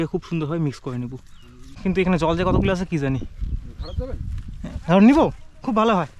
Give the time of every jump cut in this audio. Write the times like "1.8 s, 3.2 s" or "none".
1.8 s